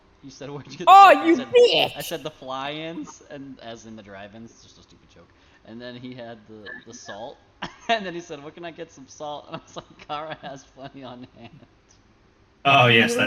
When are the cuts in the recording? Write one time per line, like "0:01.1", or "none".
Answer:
none